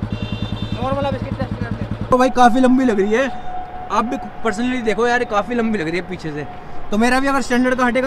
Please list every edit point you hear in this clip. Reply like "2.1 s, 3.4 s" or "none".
2.1 s